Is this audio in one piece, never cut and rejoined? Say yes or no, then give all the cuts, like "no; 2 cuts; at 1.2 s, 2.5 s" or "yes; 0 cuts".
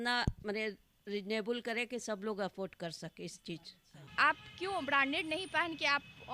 no; 1 cut; at 4.1 s